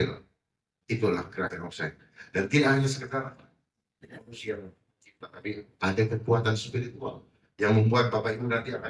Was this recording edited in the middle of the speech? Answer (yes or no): no